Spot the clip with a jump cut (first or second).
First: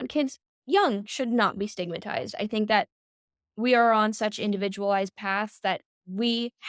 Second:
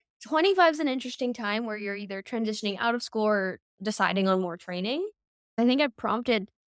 second